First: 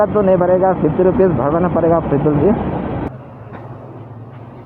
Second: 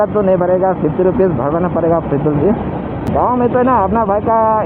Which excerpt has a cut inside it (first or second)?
first